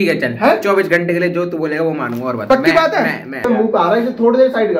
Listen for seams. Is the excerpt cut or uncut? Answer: cut